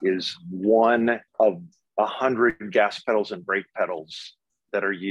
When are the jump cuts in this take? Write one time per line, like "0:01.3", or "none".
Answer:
0:01.3